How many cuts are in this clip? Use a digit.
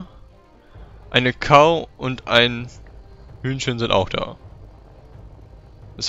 0